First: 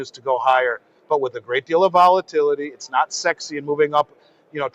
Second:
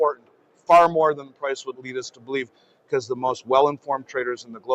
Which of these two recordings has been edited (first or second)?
second